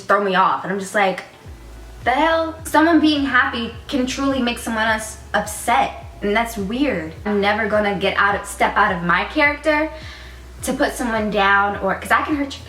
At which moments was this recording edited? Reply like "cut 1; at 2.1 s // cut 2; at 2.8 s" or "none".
cut 1; at 2.6 s // cut 2; at 7.2 s